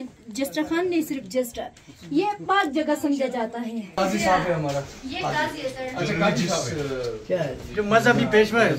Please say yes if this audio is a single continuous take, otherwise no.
no